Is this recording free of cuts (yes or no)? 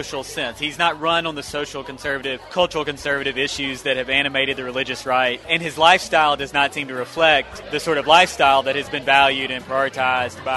no